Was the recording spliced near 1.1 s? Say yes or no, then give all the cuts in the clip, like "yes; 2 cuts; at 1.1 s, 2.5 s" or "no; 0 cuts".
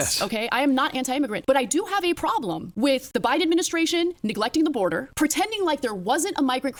no; 0 cuts